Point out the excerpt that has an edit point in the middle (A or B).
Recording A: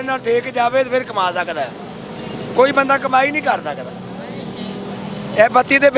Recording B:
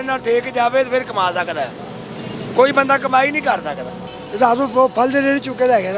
B